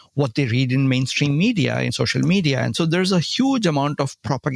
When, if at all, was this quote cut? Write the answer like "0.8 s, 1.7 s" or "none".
1.9 s, 2.7 s